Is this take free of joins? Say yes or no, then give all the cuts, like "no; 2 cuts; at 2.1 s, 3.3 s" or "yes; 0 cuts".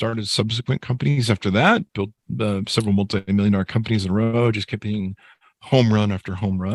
yes; 0 cuts